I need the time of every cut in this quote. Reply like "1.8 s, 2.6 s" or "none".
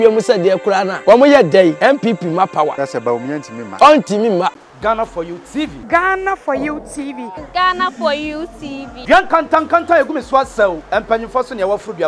0.9 s, 1.8 s, 3.2 s, 4.6 s